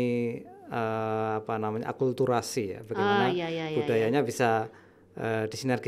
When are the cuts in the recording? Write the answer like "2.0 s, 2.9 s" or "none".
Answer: none

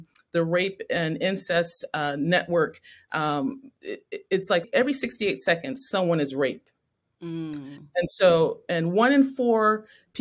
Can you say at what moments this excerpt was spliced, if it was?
4.6 s

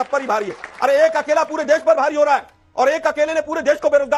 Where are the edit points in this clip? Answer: none

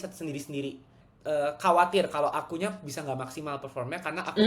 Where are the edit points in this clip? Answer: 1.1 s

